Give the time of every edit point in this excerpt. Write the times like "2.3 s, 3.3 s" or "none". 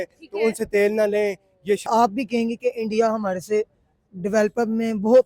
1.9 s